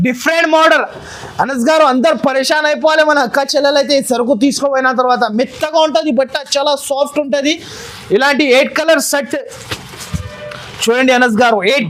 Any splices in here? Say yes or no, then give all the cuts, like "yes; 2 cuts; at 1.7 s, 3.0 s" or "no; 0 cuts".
no; 0 cuts